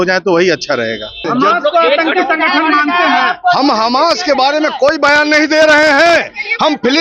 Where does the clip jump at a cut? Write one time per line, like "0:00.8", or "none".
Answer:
0:01.2